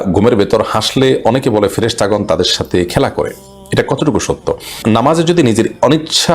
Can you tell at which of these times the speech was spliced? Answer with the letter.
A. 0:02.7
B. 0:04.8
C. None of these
B